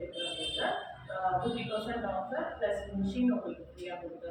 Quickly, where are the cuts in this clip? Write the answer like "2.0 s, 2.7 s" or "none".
none